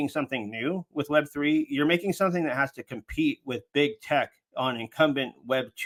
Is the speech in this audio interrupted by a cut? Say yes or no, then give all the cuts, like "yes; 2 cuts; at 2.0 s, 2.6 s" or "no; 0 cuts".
no; 0 cuts